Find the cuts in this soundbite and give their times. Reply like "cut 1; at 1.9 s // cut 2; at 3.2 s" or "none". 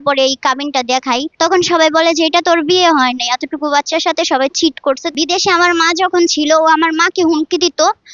cut 1; at 1.3 s // cut 2; at 5.1 s